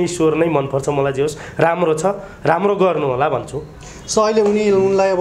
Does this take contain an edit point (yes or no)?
no